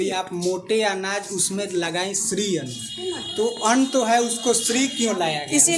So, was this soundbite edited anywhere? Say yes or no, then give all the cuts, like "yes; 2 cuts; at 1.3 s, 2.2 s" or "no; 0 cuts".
no; 0 cuts